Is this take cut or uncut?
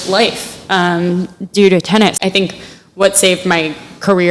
cut